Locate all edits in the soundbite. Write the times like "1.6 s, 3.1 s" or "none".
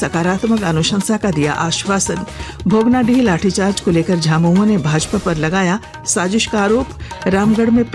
none